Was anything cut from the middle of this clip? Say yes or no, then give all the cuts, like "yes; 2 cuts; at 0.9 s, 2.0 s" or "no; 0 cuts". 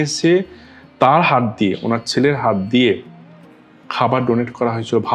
no; 0 cuts